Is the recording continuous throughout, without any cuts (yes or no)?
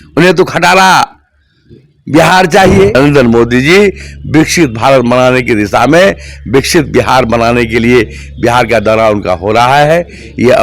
no